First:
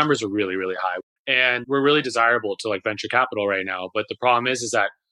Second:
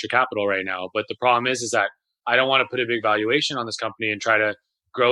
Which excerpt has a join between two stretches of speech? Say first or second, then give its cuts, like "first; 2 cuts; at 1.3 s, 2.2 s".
first; 1 cut; at 1.1 s